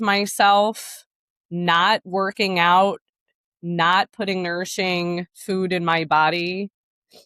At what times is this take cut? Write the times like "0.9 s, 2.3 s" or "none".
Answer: none